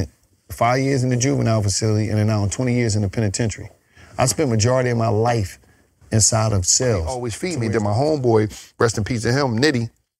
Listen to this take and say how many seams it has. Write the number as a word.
one